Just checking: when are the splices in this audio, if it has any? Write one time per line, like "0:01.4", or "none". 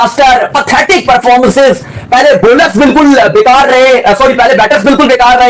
none